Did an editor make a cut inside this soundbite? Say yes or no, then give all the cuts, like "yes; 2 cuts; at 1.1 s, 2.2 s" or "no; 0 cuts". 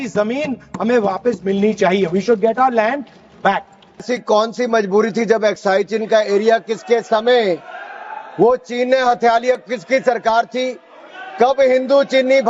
yes; 1 cut; at 4.0 s